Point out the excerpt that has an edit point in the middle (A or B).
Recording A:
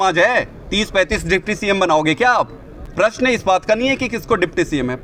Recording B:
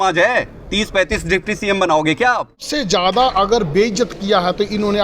B